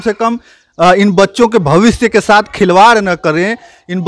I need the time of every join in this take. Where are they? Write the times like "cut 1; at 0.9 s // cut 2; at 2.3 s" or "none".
none

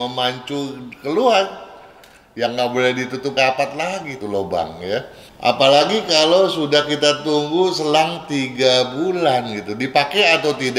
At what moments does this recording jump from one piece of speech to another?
cut 1; at 5.2 s

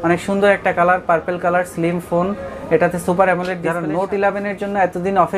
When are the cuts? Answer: cut 1; at 3.6 s

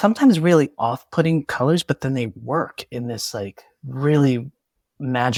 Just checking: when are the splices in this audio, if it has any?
none

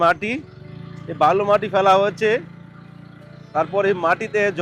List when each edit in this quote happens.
none

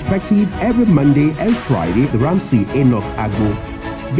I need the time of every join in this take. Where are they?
cut 1; at 2.1 s

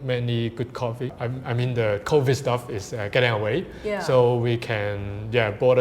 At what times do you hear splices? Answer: cut 1; at 1.1 s

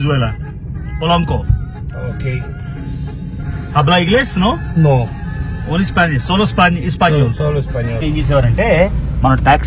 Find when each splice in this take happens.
cut 1; at 8.0 s

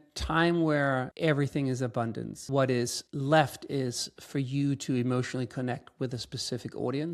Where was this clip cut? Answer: cut 1; at 1.1 s // cut 2; at 2.3 s // cut 3; at 3.0 s

